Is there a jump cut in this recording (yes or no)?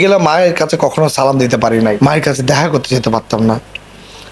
yes